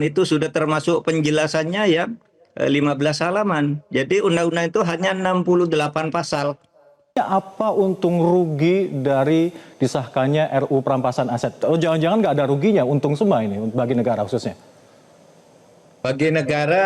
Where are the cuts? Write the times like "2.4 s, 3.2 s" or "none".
7.2 s